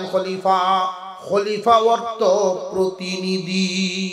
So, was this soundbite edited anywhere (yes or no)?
yes